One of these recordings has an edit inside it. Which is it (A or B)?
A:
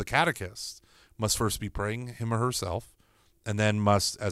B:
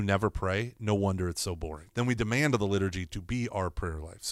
B